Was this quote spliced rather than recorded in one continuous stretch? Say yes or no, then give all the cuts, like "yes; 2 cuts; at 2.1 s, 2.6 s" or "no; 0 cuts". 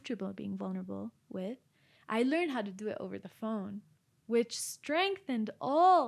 no; 0 cuts